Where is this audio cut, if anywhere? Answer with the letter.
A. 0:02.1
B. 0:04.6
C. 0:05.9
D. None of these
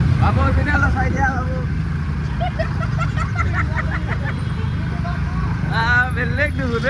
D